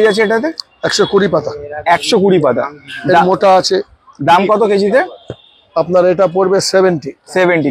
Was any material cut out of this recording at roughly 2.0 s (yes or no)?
no